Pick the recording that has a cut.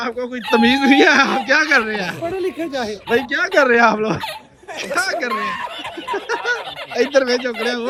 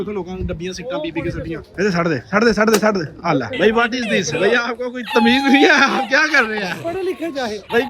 second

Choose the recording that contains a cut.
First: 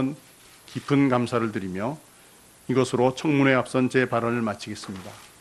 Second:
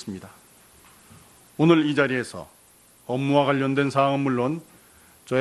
first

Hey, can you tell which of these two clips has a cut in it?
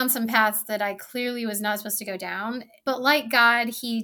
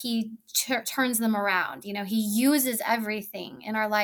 first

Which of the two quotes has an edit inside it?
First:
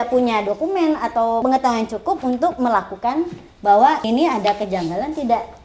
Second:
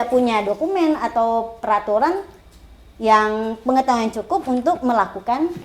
first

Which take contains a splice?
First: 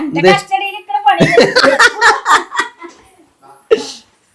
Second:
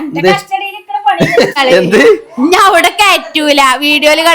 second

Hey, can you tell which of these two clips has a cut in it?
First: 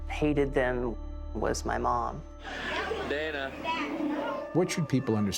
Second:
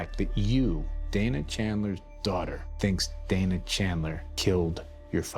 second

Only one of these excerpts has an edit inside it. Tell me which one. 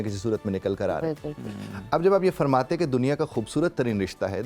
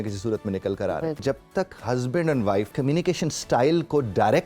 second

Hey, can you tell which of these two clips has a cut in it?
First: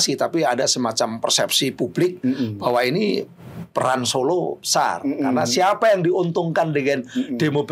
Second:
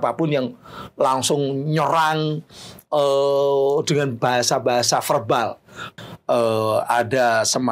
second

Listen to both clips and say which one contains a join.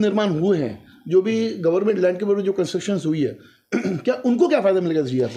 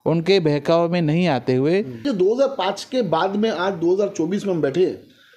second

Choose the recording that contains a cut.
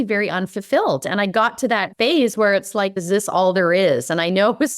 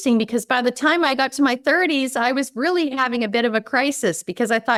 first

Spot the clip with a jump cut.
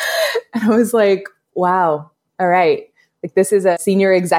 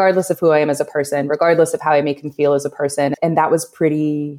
second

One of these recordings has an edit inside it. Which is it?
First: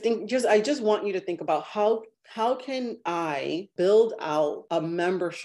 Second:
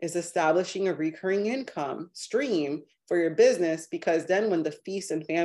first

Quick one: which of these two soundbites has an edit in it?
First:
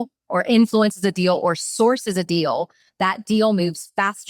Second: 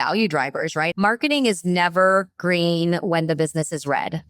second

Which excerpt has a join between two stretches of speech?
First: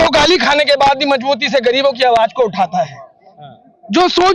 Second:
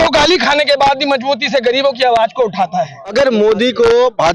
second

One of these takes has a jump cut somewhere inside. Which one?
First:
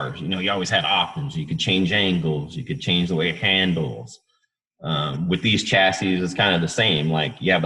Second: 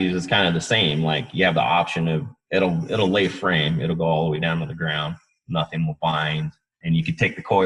second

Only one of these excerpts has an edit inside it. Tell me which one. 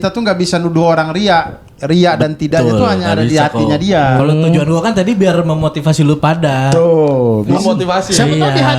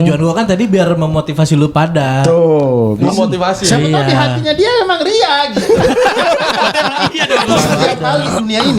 second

